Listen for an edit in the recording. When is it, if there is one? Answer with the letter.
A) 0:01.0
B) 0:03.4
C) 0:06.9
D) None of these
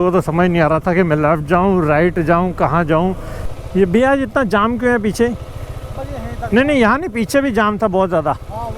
B